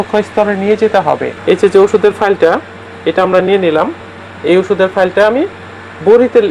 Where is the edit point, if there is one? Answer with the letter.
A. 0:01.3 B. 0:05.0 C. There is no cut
A